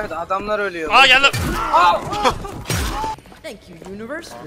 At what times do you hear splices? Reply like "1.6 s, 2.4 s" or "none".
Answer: 3.2 s